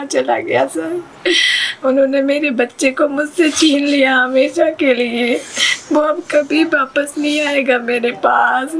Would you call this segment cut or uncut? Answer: uncut